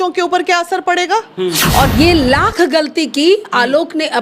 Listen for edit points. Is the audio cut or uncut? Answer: cut